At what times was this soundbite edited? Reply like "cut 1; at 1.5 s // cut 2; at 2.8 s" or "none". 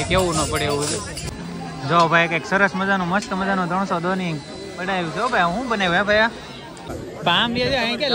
cut 1; at 1.3 s // cut 2; at 7.0 s